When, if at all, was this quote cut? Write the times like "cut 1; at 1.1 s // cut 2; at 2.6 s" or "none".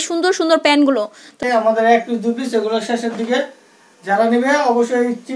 cut 1; at 1.4 s